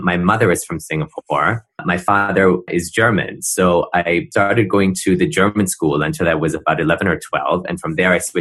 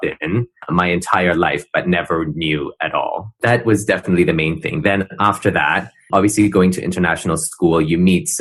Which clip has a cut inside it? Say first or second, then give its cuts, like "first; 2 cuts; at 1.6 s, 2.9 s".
first; 2 cuts; at 2.7 s, 4.3 s